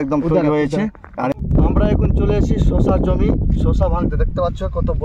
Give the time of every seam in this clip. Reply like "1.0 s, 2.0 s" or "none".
1.2 s